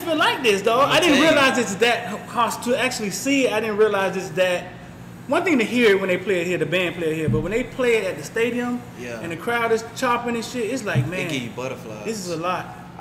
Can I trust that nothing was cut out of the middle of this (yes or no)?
yes